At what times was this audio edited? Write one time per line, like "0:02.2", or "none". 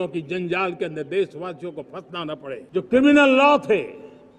0:02.6